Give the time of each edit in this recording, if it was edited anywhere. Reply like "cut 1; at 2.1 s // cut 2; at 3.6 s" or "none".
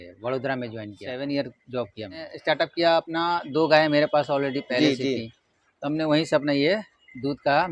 cut 1; at 1.0 s // cut 2; at 2.3 s